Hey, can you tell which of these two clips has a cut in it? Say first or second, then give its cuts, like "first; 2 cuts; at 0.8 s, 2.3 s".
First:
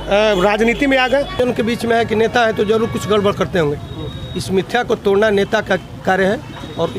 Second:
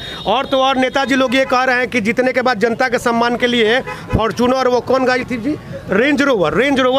first; 1 cut; at 1.4 s